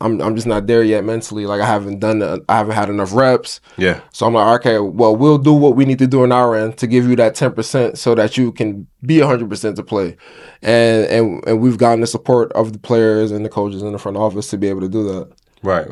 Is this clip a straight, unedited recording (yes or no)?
yes